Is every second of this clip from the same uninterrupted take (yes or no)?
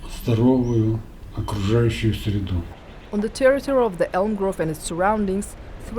no